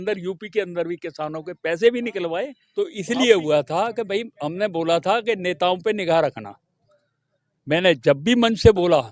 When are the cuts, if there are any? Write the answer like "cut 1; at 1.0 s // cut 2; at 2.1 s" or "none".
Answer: cut 1; at 2.6 s